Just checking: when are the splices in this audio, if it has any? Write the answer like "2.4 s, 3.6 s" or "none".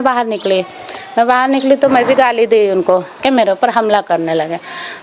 3.2 s

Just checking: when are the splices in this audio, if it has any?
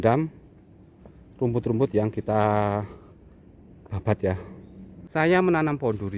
4.9 s

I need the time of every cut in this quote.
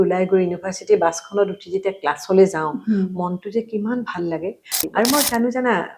4.8 s

